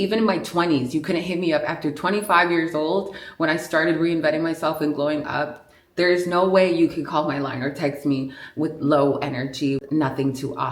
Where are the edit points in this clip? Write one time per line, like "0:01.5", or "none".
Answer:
0:09.8